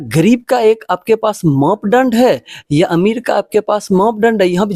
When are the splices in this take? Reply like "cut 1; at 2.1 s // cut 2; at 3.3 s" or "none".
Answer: none